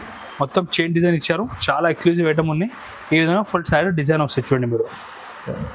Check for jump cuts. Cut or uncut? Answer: uncut